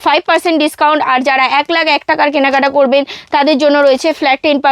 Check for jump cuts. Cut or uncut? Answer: uncut